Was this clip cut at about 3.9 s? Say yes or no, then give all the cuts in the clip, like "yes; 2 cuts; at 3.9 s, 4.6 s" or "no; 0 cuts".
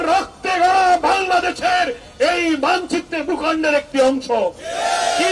no; 0 cuts